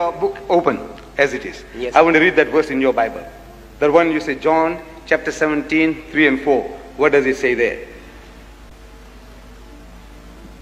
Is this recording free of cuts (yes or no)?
yes